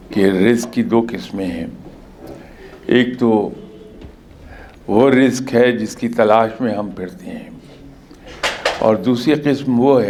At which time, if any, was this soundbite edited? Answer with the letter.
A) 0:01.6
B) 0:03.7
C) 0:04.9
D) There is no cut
D